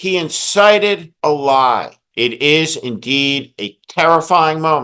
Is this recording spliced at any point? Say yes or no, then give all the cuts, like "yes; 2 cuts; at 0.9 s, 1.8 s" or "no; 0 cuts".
yes; 2 cuts; at 1.1 s, 2.0 s